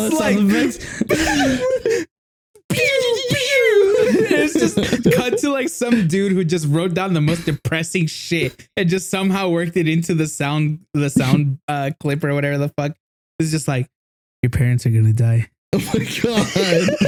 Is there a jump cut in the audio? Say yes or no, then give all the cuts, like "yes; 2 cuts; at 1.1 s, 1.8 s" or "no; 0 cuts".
no; 0 cuts